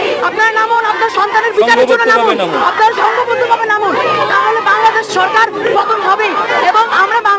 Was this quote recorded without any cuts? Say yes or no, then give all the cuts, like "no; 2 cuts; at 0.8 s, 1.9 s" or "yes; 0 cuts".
yes; 0 cuts